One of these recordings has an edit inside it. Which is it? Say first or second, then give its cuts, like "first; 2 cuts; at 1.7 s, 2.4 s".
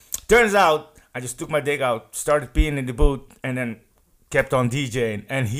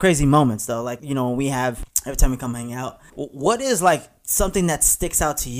second; 3 cuts; at 1.0 s, 1.9 s, 3.0 s